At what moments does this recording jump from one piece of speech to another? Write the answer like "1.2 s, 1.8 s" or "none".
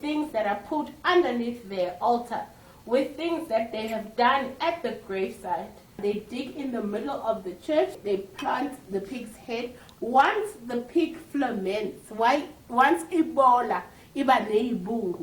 6.0 s, 8.0 s